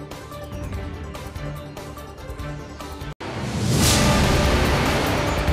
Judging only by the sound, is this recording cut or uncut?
uncut